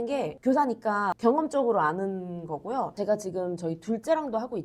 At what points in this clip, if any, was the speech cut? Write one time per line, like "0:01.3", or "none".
0:01.1
0:02.9